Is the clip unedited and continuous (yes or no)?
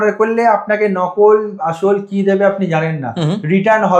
yes